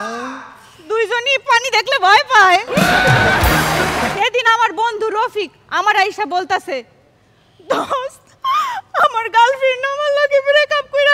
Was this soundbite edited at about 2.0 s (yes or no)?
no